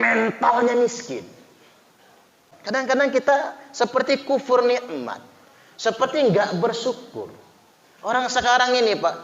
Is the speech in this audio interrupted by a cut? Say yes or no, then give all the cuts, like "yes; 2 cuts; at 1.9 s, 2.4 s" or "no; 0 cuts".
yes; 1 cut; at 2.5 s